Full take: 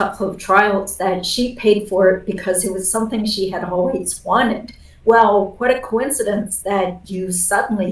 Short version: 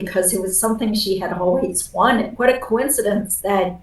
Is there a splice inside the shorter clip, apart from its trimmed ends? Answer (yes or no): yes